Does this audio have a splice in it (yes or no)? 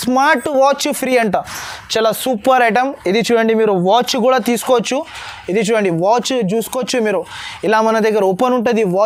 no